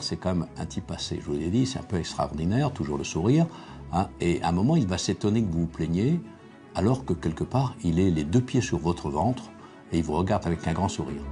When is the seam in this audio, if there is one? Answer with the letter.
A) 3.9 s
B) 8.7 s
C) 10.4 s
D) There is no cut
C